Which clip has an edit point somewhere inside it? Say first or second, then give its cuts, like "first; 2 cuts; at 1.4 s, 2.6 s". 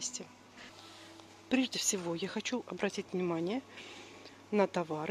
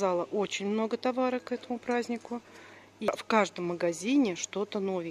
second; 1 cut; at 3.1 s